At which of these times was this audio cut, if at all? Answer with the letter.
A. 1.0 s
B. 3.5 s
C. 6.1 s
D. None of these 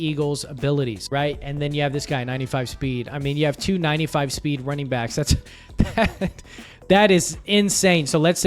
A